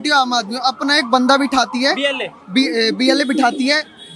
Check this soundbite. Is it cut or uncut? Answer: uncut